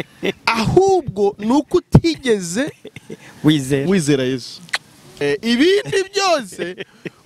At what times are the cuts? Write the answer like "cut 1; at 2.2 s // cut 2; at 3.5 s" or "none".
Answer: cut 1; at 5.2 s